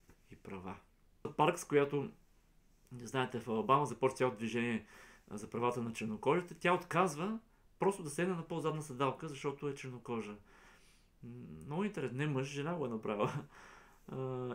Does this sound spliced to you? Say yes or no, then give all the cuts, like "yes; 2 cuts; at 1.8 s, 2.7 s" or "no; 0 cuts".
yes; 1 cut; at 1.3 s